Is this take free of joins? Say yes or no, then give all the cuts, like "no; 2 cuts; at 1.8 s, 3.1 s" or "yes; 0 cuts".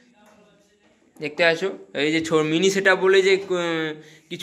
yes; 0 cuts